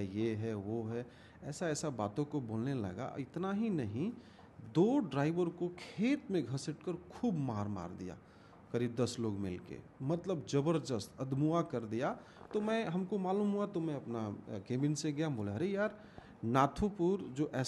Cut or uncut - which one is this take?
uncut